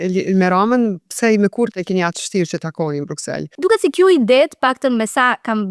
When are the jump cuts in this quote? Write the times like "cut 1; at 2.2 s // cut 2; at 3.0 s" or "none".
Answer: cut 1; at 3.5 s